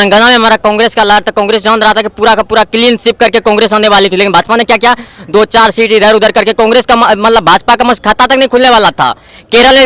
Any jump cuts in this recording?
no; 0 cuts

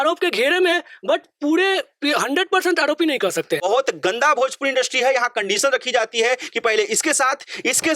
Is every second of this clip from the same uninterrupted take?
no; 1 cut; at 3.6 s

